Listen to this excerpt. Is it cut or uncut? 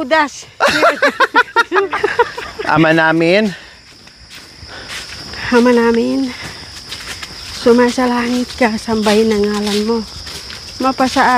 cut